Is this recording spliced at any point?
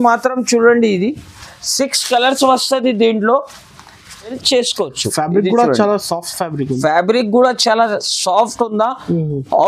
yes; 1 cut; at 4.4 s

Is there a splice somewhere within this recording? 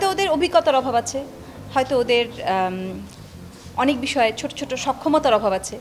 no; 0 cuts

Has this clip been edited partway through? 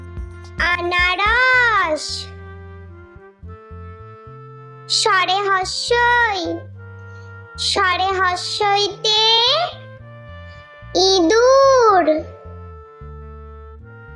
yes; 2 cuts; at 2.1 s, 4.6 s

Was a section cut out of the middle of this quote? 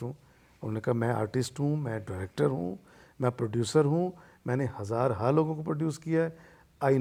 no; 0 cuts

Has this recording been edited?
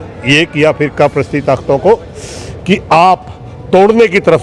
no; 0 cuts

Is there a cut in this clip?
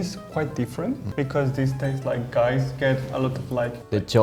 no; 0 cuts

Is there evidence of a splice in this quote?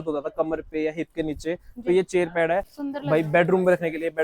yes; 1 cut; at 2.8 s

